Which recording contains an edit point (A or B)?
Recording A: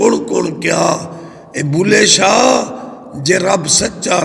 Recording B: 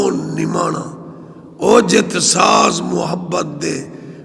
B